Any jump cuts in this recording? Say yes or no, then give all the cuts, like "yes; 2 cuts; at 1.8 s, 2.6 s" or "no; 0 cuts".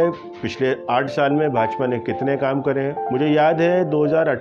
yes; 1 cut; at 3.0 s